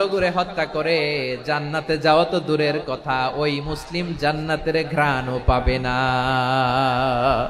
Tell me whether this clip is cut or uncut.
uncut